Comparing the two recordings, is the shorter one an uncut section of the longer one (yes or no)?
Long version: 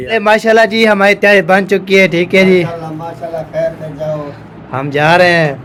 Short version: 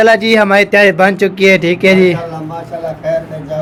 yes